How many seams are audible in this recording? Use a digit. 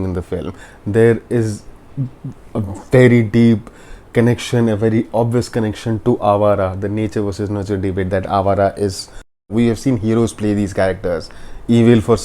1